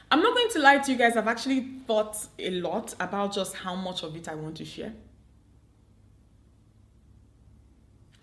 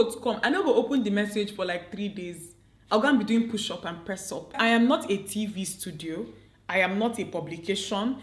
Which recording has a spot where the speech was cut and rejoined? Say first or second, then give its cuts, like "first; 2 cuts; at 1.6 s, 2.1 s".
second; 1 cut; at 4.6 s